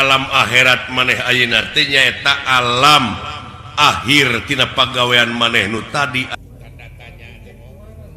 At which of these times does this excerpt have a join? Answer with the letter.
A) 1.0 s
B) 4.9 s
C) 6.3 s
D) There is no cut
C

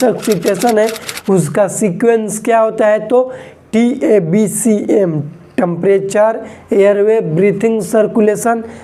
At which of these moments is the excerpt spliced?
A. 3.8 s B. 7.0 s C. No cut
C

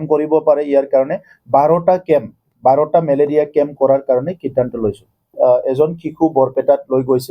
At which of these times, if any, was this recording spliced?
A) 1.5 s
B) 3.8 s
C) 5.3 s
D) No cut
C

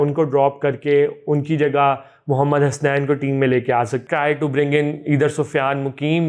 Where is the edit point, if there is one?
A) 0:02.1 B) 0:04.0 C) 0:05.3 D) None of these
B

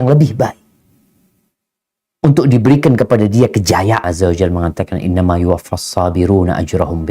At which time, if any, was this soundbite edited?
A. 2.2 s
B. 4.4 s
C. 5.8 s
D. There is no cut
B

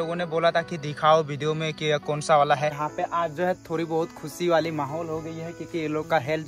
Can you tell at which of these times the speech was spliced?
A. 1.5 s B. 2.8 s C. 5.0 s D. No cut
B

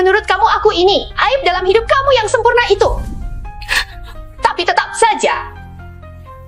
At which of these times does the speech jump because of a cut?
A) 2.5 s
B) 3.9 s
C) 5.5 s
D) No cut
C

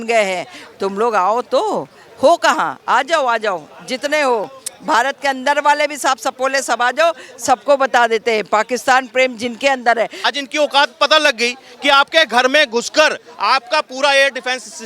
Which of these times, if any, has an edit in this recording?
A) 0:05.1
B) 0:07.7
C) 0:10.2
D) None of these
C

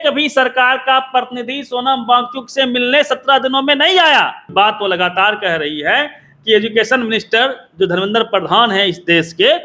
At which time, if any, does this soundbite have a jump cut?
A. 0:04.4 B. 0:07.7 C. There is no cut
A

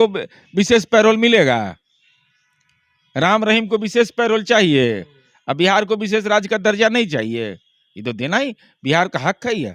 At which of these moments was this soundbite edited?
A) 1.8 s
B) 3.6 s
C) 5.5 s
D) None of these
D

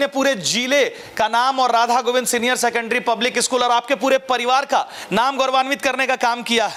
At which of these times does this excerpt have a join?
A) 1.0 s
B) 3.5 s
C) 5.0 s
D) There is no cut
D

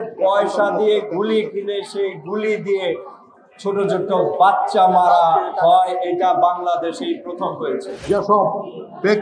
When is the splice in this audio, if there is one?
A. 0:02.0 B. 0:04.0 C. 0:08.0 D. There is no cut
C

